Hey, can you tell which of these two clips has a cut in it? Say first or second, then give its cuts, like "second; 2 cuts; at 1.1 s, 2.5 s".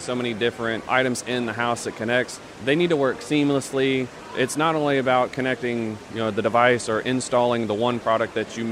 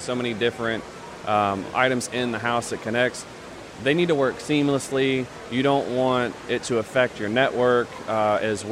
first; 3 cuts; at 0.8 s, 2.4 s, 4.2 s